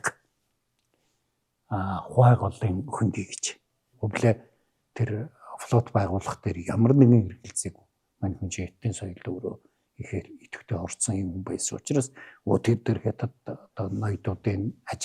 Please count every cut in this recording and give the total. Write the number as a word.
one